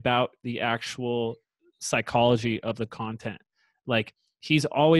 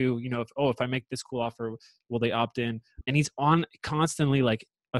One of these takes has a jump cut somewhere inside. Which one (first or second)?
second